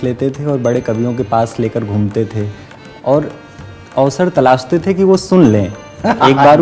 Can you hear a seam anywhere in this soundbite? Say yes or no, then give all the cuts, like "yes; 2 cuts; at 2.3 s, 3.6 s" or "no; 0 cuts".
no; 0 cuts